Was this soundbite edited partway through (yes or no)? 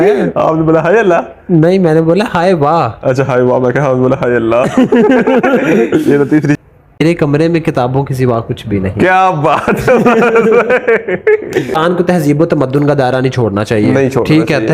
yes